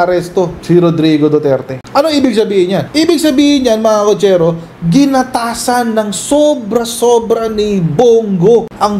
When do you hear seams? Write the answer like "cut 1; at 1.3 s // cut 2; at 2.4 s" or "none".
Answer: cut 1; at 1.8 s